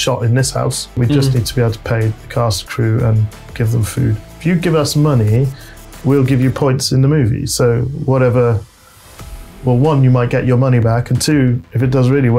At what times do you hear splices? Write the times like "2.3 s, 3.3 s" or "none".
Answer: 1.0 s, 4.3 s